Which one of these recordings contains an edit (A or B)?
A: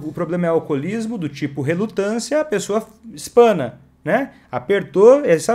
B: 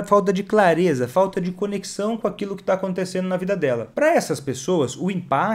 B